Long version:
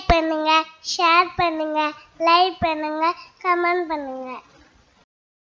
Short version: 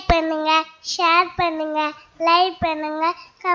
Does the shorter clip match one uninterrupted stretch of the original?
yes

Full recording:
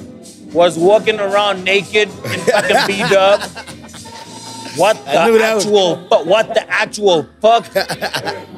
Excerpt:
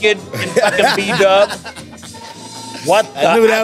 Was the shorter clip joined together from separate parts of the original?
no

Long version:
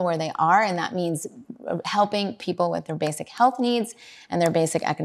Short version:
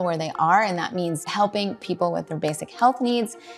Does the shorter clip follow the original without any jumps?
no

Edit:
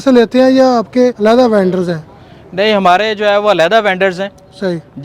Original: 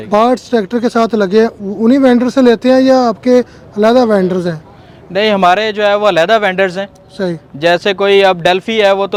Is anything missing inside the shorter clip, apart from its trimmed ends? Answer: yes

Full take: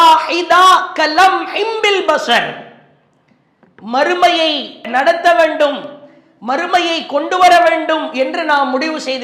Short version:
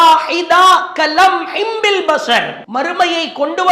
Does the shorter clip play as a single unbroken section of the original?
no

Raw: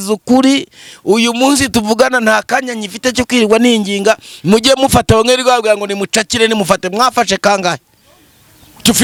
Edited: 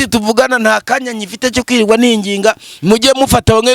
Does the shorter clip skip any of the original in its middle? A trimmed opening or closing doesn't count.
no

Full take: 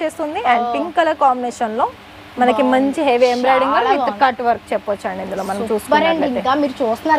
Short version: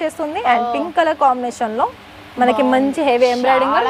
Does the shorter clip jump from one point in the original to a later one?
no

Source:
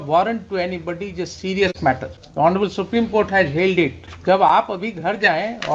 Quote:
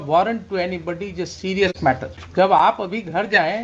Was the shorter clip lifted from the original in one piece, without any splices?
no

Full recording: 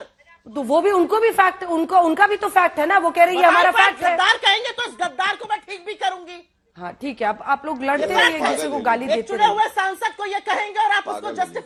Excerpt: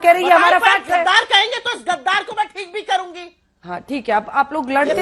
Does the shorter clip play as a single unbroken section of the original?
yes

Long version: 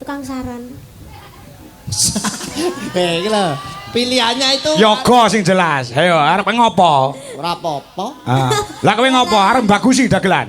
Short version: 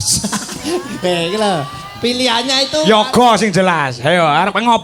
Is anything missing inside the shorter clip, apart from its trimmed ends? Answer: no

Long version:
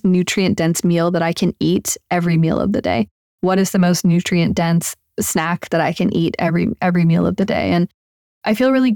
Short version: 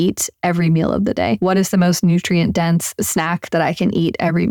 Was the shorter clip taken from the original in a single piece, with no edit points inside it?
no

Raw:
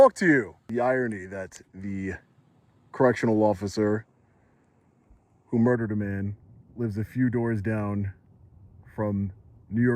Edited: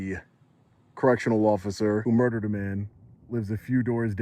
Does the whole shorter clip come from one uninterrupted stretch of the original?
no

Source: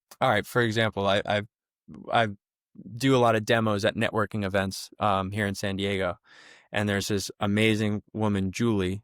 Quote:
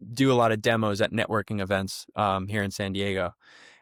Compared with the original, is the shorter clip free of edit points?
yes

